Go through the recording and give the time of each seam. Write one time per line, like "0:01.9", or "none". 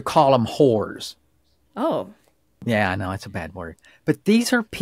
0:02.5